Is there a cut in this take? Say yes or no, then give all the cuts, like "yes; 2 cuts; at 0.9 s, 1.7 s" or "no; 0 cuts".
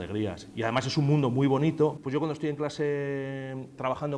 yes; 1 cut; at 2.0 s